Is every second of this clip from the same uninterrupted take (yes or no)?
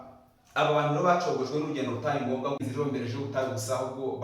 no